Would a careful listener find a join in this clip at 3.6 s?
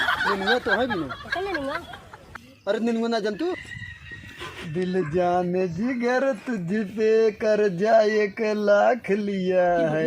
yes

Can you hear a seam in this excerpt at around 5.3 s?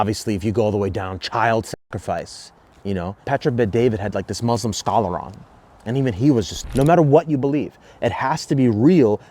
no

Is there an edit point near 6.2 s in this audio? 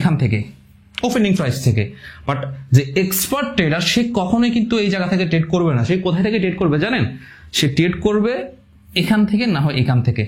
no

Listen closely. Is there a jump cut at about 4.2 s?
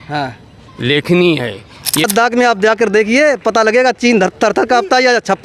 no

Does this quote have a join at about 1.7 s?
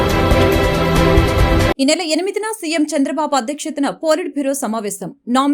yes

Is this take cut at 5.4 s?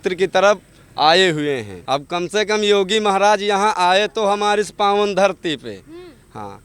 no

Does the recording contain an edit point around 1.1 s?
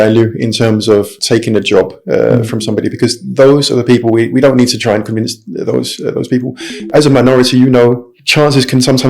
yes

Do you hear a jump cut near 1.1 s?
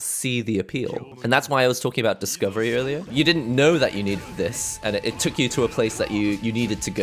yes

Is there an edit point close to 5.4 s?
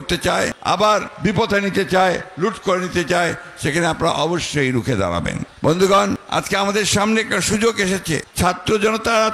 yes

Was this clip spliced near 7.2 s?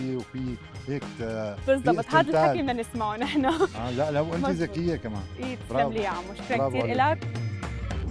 yes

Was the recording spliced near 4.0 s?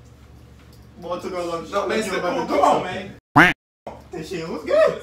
yes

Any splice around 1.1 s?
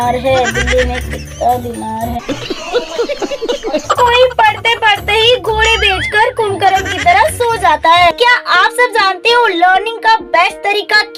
no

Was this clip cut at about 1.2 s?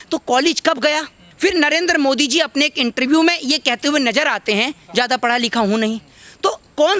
yes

